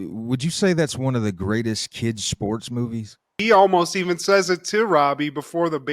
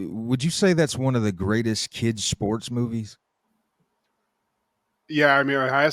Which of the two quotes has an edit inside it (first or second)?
first